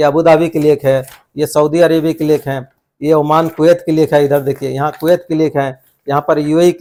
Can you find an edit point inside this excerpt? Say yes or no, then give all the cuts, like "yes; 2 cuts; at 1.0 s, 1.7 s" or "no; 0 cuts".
no; 0 cuts